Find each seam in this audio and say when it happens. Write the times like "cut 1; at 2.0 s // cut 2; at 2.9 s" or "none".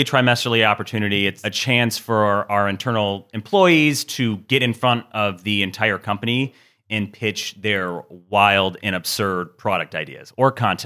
cut 1; at 1.5 s